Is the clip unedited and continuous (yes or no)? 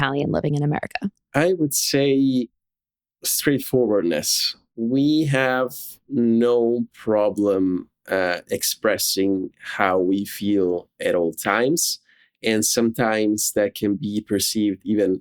no